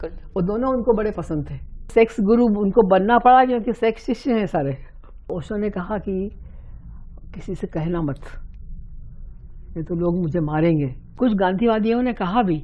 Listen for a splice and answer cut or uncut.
cut